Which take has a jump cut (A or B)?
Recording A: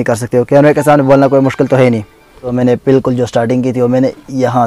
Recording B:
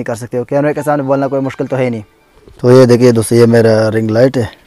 A